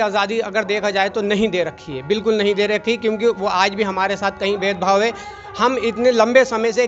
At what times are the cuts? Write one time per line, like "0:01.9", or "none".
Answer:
none

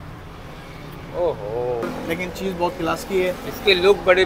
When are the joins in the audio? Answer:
0:01.8

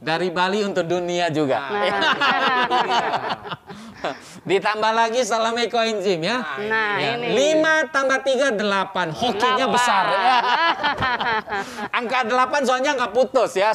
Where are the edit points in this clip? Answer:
none

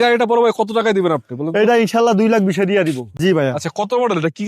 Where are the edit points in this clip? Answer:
0:03.1

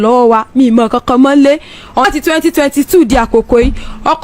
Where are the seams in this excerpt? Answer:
0:02.1

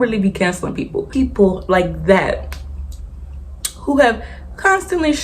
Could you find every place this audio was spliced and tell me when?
0:01.0

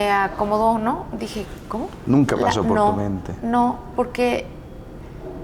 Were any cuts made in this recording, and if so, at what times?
0:01.9

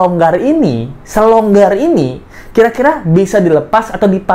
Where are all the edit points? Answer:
none

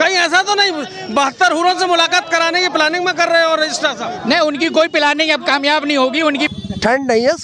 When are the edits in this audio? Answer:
0:06.5

